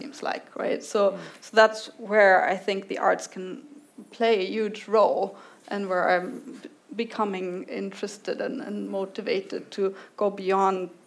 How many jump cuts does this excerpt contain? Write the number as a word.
zero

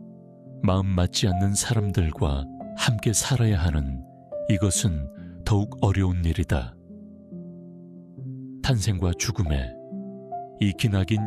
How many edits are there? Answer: two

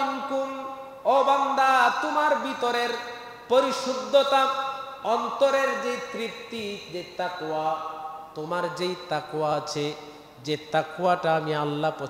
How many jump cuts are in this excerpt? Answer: zero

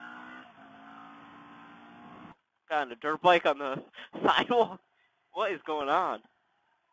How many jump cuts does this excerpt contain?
one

